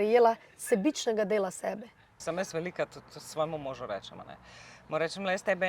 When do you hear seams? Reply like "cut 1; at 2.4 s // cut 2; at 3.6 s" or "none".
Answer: cut 1; at 2.1 s